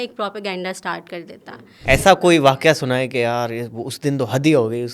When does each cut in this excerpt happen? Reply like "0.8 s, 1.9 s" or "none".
1.8 s